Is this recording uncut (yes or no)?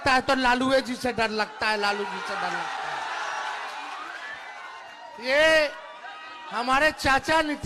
yes